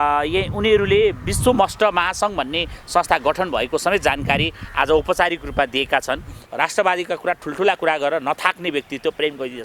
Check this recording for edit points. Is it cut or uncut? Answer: cut